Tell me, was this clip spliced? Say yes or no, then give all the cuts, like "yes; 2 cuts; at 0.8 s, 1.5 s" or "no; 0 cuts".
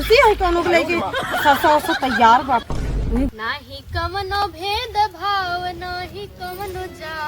yes; 1 cut; at 3.4 s